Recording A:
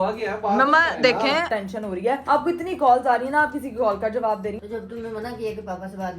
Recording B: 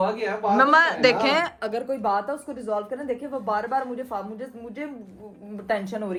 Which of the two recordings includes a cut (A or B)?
A